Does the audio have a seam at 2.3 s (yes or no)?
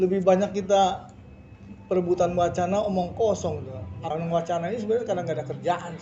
no